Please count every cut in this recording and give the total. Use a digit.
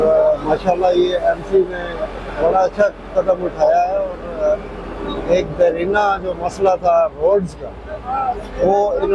0